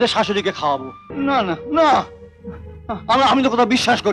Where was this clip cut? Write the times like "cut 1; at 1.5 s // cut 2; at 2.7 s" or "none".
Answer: cut 1; at 1.0 s